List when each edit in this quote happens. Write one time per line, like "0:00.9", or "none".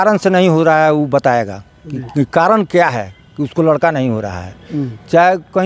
none